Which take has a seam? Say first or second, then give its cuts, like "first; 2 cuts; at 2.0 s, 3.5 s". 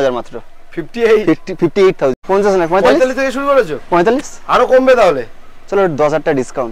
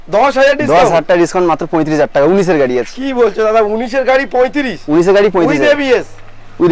first; 1 cut; at 2.2 s